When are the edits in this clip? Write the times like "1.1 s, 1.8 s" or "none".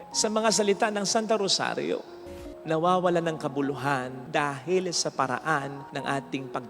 2.2 s